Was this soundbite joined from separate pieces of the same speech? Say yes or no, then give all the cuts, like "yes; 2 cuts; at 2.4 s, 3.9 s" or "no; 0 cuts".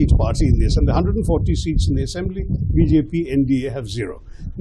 no; 0 cuts